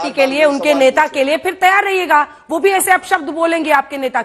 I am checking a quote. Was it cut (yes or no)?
no